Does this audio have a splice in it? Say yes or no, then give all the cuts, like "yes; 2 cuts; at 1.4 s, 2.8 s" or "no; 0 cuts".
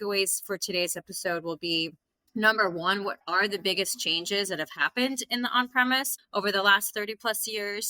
no; 0 cuts